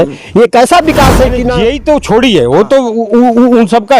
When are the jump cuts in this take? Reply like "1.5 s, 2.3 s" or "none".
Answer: 1.5 s